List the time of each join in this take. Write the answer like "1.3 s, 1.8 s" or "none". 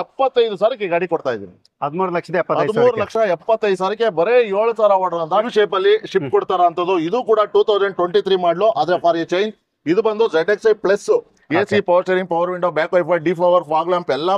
5.5 s, 11.3 s